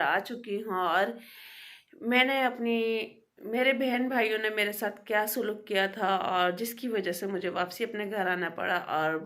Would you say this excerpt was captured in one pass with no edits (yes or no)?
yes